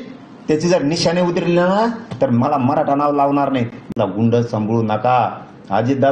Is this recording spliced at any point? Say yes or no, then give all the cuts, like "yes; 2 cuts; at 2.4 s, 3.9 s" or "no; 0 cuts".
yes; 1 cut; at 3.9 s